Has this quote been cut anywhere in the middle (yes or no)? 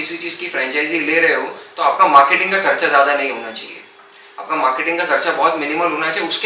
no